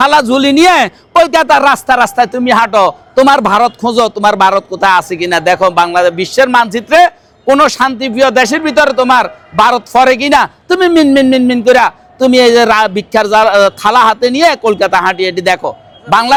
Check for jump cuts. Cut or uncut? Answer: uncut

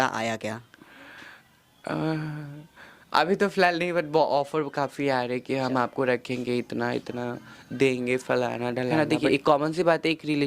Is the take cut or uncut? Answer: cut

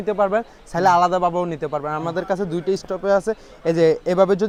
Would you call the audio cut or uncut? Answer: uncut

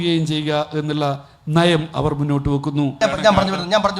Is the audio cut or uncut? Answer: cut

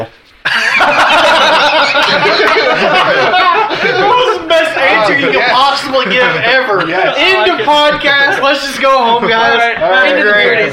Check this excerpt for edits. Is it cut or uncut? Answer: uncut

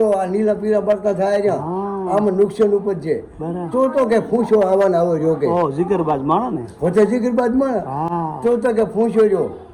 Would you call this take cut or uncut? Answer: uncut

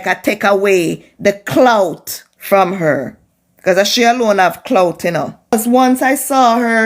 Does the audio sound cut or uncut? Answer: cut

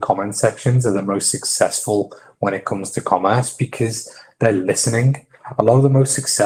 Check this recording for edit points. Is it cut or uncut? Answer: uncut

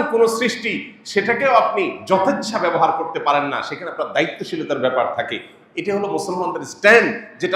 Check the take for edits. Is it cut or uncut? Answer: uncut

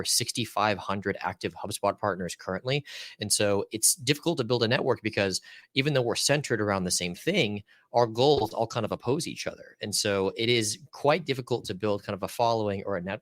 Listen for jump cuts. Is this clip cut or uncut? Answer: uncut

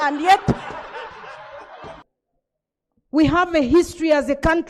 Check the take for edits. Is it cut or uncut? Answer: cut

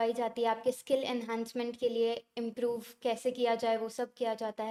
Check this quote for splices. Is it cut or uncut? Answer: uncut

